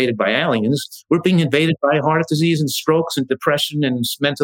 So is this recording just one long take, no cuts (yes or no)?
no